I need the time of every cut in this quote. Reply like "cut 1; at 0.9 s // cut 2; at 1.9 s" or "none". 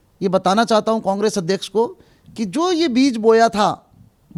none